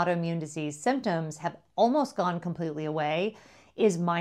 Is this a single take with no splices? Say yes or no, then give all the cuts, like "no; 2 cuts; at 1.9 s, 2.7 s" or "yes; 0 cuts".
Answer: yes; 0 cuts